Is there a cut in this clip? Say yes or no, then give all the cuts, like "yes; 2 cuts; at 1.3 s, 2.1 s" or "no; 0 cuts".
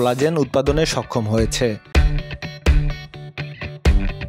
yes; 1 cut; at 1.9 s